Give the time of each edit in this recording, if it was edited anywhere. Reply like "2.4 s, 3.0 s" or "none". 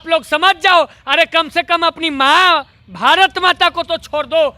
none